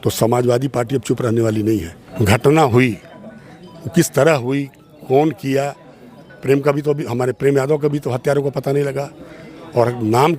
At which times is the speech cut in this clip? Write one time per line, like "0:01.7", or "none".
0:02.0